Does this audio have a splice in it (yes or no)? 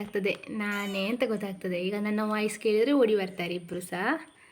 no